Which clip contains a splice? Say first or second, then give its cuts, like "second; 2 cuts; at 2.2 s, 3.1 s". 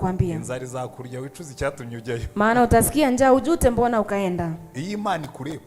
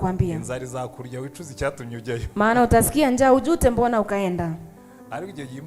first; 1 cut; at 4.7 s